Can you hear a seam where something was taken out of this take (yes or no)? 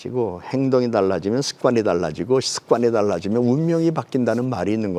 no